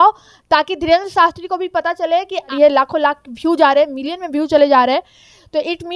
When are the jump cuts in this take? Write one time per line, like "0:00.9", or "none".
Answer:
0:02.5